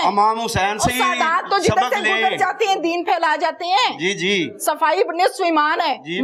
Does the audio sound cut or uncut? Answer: uncut